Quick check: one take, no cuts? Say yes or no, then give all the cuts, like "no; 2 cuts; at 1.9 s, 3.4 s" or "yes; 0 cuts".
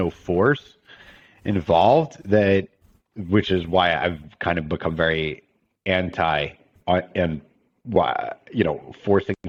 yes; 0 cuts